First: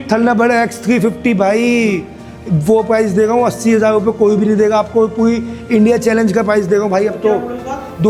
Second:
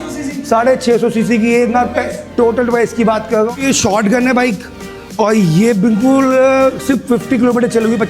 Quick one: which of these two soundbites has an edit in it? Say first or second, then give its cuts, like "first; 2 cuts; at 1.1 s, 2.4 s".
second; 1 cut; at 3.5 s